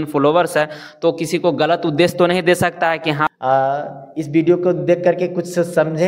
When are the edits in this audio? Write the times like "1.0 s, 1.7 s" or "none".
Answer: 3.3 s